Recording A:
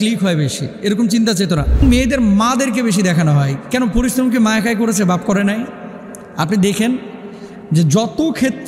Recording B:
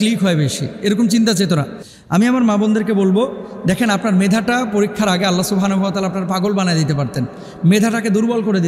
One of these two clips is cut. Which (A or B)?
A